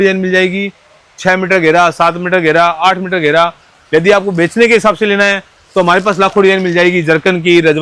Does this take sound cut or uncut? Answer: uncut